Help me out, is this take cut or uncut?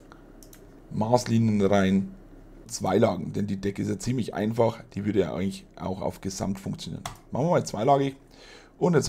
cut